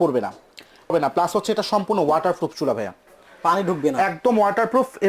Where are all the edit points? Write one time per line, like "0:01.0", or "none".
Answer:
0:00.9